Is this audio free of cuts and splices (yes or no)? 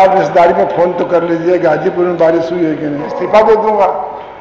no